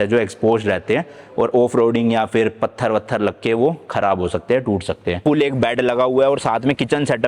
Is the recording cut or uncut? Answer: cut